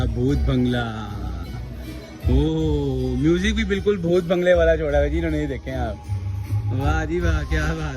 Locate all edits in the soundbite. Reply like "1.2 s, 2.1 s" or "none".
none